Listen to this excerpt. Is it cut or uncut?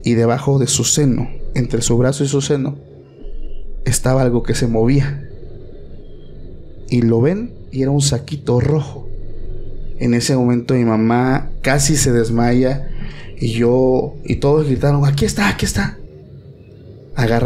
uncut